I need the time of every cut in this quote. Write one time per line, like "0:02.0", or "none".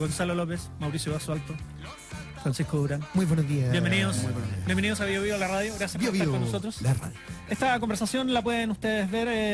0:04.5

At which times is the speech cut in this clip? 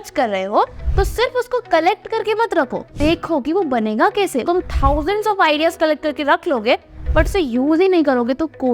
0:03.0
0:04.4

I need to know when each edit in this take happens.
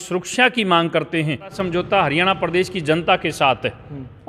0:01.6

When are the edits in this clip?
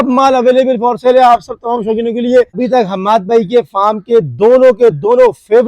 0:02.5

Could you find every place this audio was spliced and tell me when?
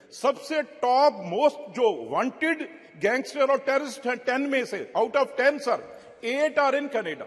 none

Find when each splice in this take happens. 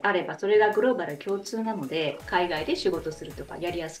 0:02.2

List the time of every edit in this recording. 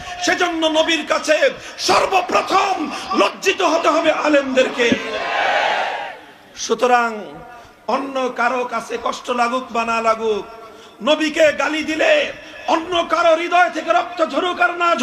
none

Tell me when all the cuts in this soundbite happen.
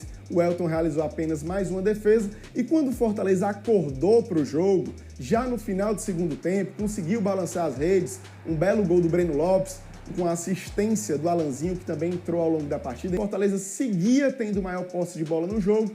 0:13.2

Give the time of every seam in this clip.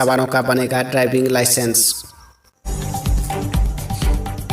0:02.5

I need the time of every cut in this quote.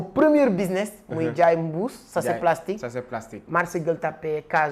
none

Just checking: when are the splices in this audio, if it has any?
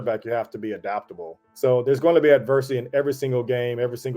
0:01.5

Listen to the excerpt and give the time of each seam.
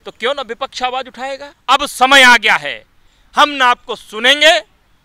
0:01.5

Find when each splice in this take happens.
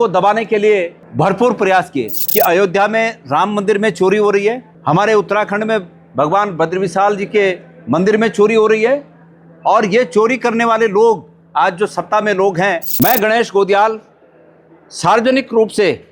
0:01.0
0:02.2
0:04.7
0:12.9

